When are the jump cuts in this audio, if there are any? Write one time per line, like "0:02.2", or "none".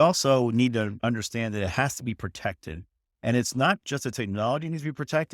0:01.0